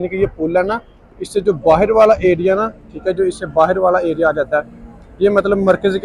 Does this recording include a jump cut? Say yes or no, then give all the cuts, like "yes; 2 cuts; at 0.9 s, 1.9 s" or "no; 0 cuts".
no; 0 cuts